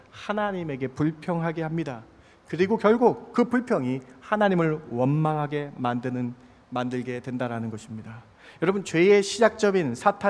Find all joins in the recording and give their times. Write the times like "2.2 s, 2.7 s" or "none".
none